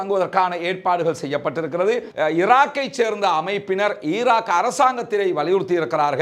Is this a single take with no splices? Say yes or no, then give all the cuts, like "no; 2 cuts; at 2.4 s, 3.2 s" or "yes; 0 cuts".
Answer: no; 1 cut; at 2.1 s